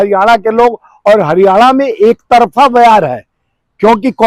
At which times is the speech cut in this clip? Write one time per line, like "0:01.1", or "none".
none